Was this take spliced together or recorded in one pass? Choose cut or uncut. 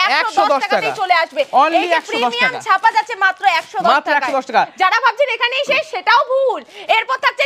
uncut